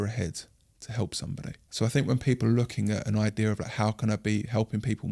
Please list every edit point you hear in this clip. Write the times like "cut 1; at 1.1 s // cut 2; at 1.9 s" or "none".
cut 1; at 1.6 s